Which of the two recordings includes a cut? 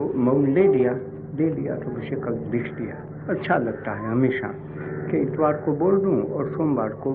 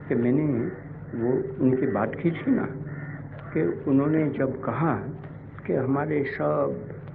second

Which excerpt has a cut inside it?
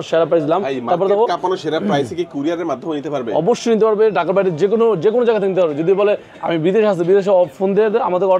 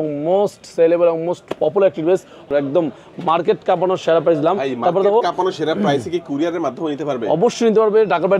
second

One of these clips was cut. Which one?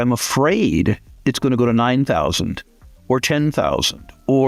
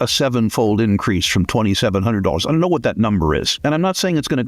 second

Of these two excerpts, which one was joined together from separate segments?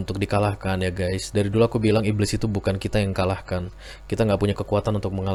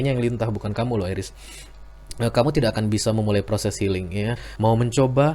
second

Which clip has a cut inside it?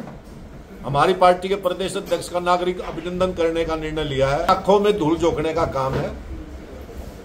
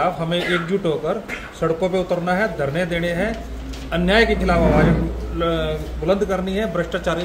first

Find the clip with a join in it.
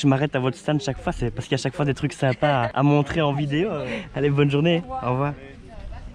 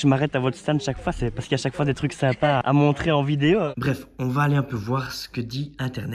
second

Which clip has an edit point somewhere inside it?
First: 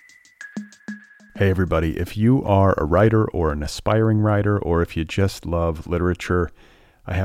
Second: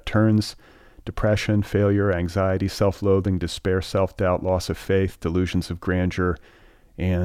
first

